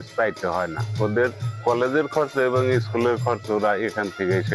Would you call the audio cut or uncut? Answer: uncut